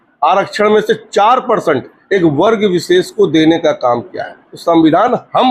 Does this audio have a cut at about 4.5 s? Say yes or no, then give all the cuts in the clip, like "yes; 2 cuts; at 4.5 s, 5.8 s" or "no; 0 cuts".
yes; 1 cut; at 4.5 s